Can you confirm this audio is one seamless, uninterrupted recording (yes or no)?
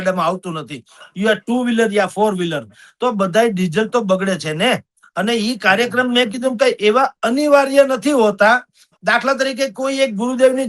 yes